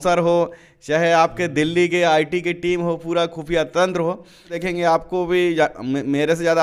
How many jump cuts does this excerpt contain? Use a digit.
1